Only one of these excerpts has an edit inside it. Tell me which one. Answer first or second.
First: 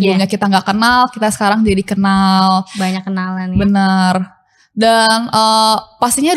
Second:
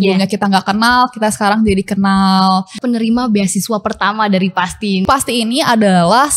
second